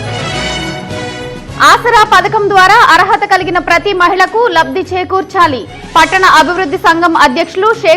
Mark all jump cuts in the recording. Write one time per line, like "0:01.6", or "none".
0:01.0